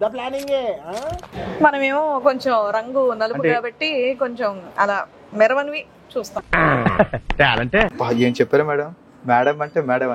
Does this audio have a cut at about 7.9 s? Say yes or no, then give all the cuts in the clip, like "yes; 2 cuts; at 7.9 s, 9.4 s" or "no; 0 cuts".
yes; 2 cuts; at 1.3 s, 7.9 s